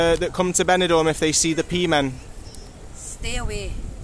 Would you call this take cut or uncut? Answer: uncut